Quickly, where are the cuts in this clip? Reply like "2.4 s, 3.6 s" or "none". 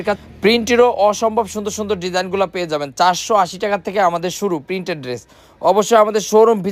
none